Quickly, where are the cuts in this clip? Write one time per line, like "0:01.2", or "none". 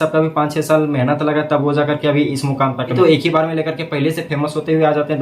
0:02.9